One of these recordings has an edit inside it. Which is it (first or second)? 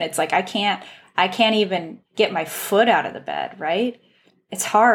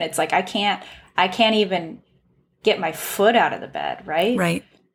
first